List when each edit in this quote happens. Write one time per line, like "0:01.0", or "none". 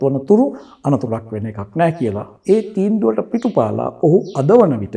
0:02.3